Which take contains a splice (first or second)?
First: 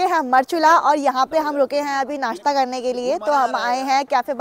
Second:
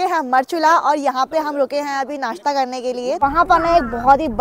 second